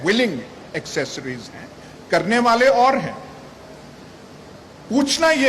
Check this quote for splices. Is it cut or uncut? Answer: uncut